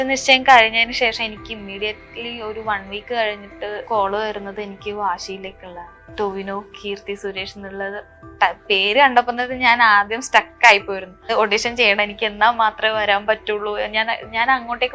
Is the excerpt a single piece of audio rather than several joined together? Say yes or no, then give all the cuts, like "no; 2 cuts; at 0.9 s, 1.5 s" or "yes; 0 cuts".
no; 3 cuts; at 3.9 s, 6.0 s, 11.3 s